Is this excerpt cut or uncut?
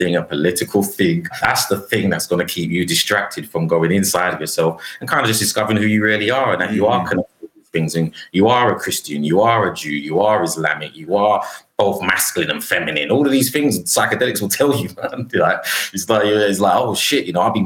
cut